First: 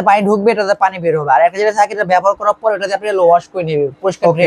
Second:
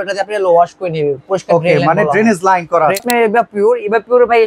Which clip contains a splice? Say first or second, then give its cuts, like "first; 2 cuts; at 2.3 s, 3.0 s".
second; 1 cut; at 3.0 s